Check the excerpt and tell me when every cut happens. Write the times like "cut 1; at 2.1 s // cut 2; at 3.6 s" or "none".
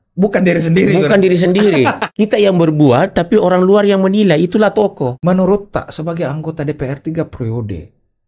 cut 1; at 2.0 s // cut 2; at 5.1 s